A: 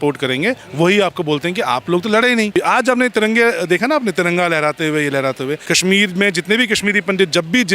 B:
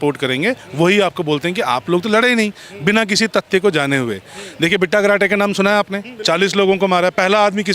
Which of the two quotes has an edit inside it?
A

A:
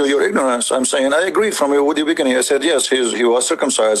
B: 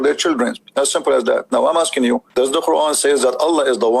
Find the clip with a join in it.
B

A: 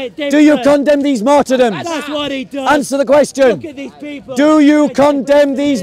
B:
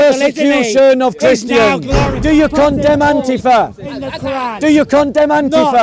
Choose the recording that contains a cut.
B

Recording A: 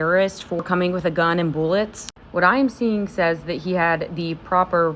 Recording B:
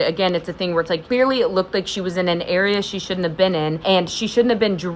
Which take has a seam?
B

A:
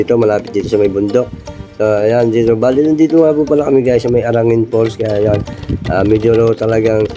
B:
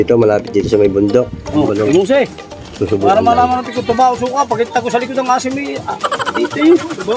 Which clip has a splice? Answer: B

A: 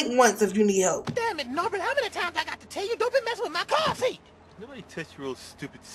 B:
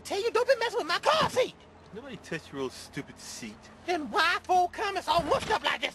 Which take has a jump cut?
A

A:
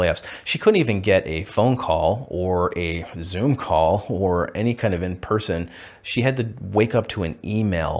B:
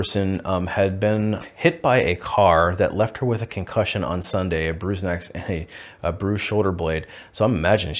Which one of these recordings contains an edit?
B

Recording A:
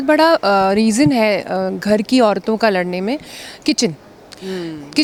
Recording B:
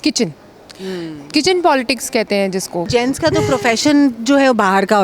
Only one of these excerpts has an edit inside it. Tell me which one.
B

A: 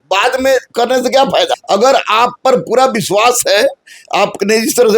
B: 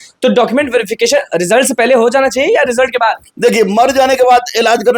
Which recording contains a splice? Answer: A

